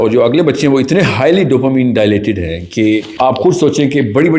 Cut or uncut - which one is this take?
cut